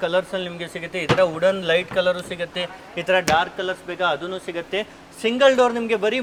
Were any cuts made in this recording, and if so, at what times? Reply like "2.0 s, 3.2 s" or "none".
none